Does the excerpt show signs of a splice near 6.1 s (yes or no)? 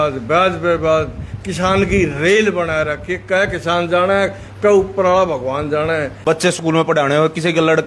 yes